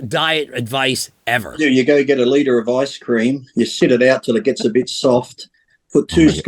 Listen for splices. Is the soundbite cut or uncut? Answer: cut